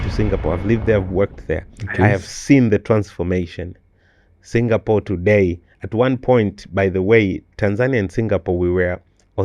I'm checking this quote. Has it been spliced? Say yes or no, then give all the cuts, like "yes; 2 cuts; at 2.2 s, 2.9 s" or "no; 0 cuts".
no; 0 cuts